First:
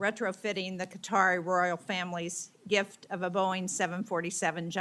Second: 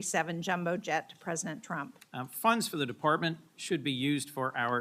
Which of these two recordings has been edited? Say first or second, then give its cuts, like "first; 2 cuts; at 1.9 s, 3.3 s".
second; 1 cut; at 2.0 s